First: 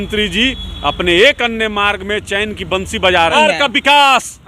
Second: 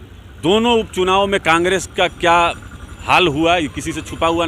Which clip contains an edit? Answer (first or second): first